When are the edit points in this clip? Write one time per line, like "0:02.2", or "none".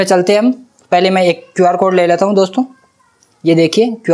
none